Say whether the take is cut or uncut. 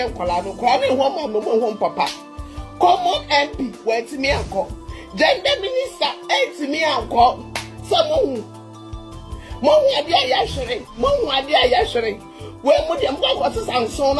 uncut